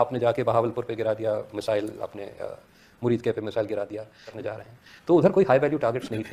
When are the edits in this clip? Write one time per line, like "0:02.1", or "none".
0:04.4